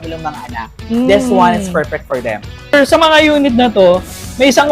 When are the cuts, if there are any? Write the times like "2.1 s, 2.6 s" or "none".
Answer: 2.7 s